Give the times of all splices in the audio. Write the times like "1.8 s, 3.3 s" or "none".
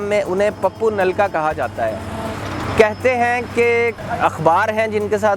none